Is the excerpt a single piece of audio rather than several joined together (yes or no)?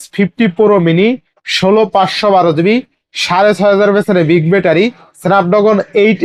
yes